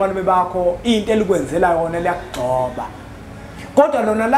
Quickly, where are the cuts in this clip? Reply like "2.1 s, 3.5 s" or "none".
none

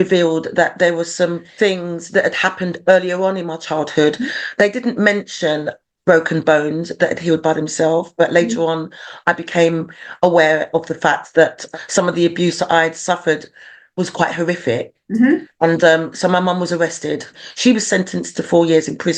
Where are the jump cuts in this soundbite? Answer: 1.4 s, 11.6 s, 17.3 s

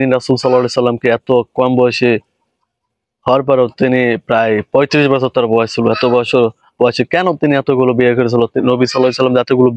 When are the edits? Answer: none

